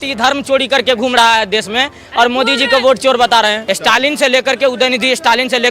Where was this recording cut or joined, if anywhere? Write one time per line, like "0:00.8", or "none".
0:03.6